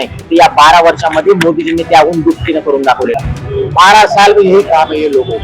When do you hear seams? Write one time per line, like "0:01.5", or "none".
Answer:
0:03.2